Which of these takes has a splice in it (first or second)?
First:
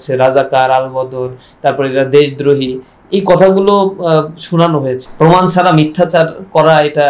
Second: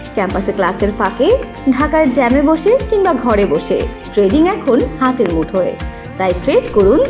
first